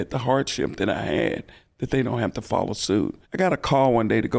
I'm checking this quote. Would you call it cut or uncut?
cut